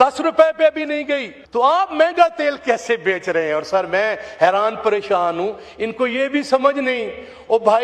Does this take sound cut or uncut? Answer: cut